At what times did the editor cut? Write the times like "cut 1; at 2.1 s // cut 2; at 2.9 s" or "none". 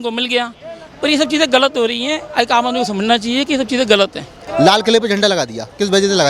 cut 1; at 4.5 s

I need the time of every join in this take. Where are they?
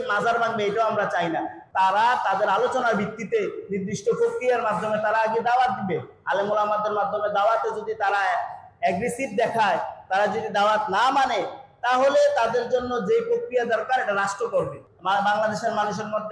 cut 1; at 1.6 s // cut 2; at 14.8 s

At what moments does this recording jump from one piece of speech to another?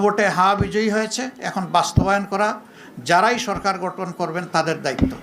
none

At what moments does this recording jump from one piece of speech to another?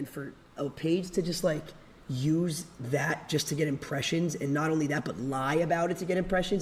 none

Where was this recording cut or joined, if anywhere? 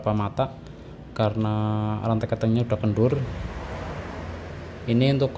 none

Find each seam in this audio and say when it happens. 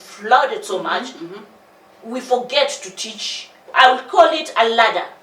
cut 1; at 3.6 s

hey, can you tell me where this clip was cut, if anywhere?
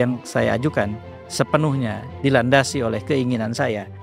none

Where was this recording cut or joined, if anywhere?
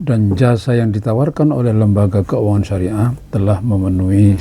cut 1; at 3.2 s

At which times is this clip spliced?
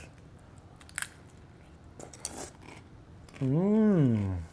none

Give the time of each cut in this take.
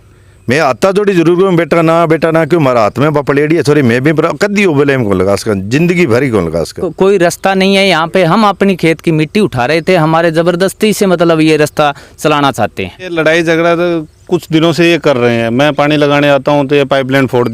cut 1; at 6.9 s // cut 2; at 13.1 s

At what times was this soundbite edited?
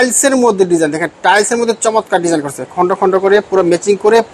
none

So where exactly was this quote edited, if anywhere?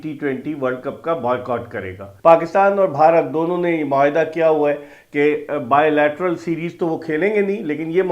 cut 1; at 2.0 s

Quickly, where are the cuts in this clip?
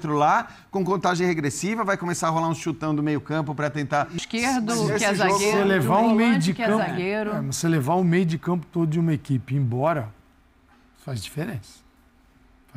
cut 1; at 4.1 s

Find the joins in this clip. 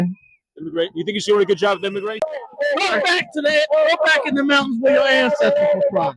cut 1; at 2.2 s

